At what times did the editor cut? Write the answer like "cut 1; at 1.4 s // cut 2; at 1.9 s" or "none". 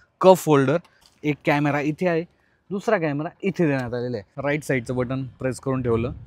cut 1; at 1.1 s // cut 2; at 4.3 s